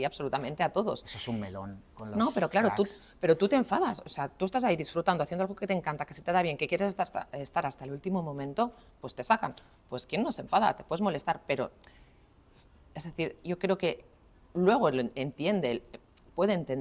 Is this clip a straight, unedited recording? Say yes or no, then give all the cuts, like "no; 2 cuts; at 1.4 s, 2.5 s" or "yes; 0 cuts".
yes; 0 cuts